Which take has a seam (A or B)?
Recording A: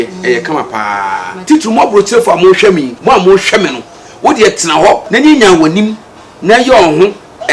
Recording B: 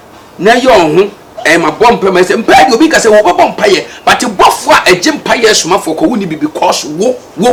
A